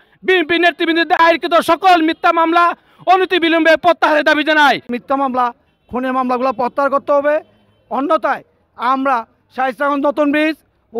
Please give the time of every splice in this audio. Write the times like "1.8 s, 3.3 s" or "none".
1.2 s, 5.0 s